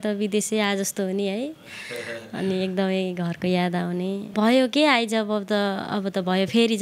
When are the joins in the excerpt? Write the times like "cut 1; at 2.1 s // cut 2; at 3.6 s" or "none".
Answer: cut 1; at 4.3 s